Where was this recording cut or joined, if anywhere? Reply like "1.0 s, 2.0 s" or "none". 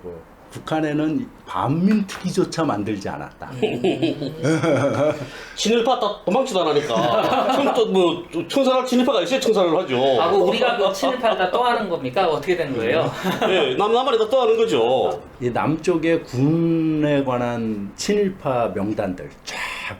15.3 s